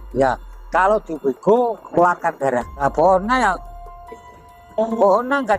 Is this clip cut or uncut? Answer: cut